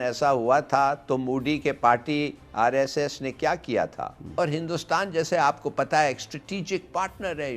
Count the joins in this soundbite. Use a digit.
1